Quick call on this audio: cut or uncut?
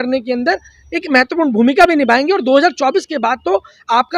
uncut